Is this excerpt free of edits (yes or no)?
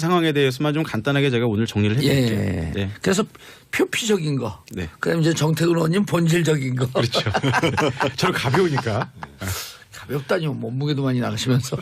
no